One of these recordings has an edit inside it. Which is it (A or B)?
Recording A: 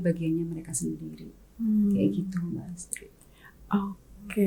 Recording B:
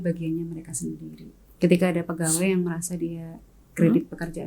B